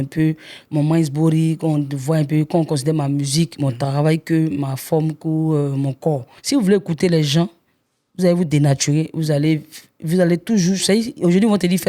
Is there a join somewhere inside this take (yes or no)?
yes